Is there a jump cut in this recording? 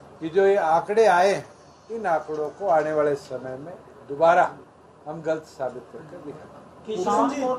no; 0 cuts

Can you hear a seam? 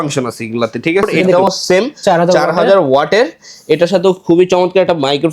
yes; 1 cut; at 1.3 s

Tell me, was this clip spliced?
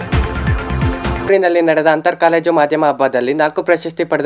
no; 0 cuts

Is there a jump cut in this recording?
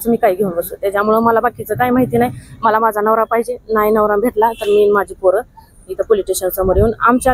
no; 0 cuts

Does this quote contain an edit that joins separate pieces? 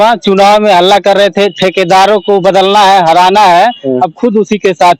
no; 0 cuts

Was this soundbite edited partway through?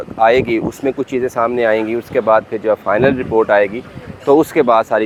no; 0 cuts

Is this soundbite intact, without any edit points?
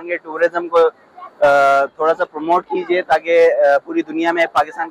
yes; 0 cuts

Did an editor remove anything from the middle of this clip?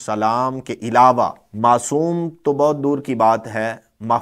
yes; 1 cut; at 1.4 s

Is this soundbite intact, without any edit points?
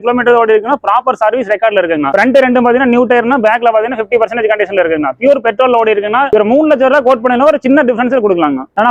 yes; 0 cuts

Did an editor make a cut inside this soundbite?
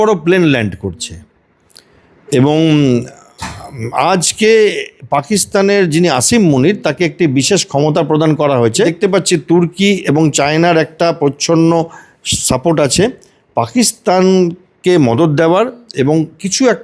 yes; 1 cut; at 8.9 s

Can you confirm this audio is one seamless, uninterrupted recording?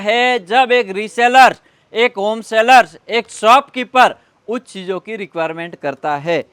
yes; 0 cuts

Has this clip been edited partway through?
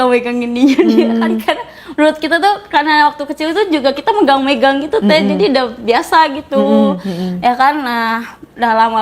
no; 0 cuts

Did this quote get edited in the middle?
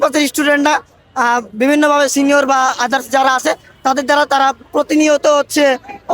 no; 0 cuts

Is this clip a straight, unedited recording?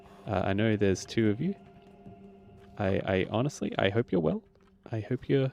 yes; 0 cuts

